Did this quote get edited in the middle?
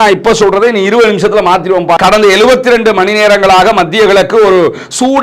yes; 1 cut; at 2.0 s

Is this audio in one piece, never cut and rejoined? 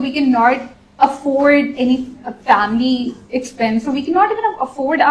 yes; 0 cuts

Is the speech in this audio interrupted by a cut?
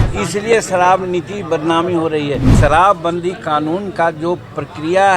yes; 1 cut; at 2.5 s

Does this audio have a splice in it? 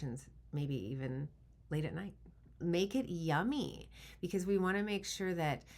yes; 1 cut; at 2.5 s

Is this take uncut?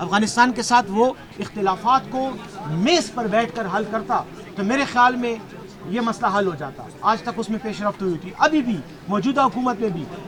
yes; 0 cuts

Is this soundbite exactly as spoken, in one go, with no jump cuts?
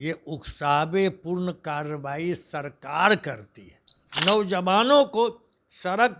no; 1 cut; at 4.1 s

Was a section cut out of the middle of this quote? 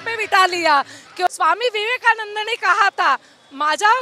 yes; 1 cut; at 1.3 s

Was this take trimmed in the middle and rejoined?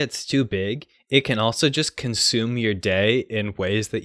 no; 0 cuts

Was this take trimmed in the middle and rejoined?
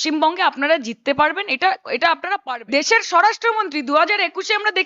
yes; 1 cut; at 2.4 s

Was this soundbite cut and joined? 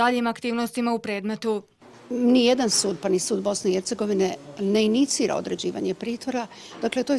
yes; 1 cut; at 5.3 s

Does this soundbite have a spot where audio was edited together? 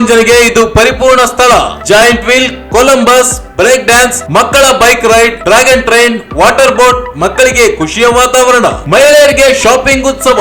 no; 0 cuts

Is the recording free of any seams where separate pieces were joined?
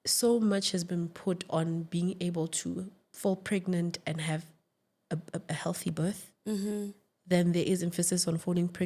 yes; 0 cuts

